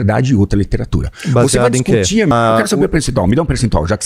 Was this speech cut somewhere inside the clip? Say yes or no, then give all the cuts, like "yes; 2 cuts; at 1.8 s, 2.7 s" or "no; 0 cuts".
yes; 1 cut; at 2.3 s